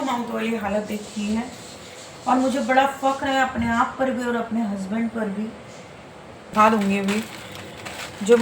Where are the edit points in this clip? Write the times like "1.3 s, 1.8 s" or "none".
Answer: 6.5 s